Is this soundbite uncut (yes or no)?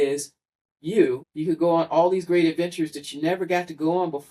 no